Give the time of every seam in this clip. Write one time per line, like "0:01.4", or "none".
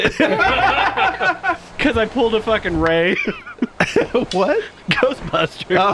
none